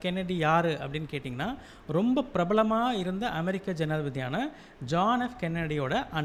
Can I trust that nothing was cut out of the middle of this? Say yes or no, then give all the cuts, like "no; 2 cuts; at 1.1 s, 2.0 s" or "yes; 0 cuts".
yes; 0 cuts